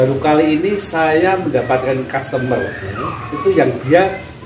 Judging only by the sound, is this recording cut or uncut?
uncut